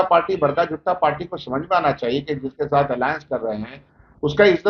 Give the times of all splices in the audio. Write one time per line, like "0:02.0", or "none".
none

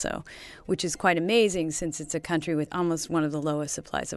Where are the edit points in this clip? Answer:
0:02.7

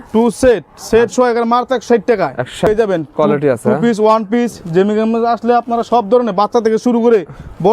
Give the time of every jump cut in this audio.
0:02.7

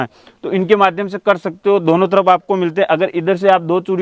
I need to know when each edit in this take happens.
none

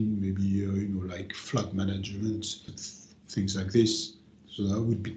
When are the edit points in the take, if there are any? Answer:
0:01.4
0:02.6

